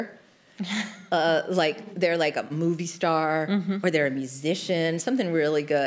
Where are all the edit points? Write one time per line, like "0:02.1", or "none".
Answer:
0:02.5